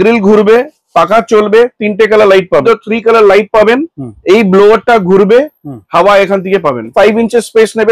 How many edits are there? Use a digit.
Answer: 2